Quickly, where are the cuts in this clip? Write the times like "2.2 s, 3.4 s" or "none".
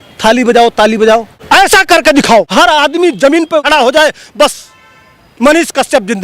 1.3 s, 2.5 s, 3.6 s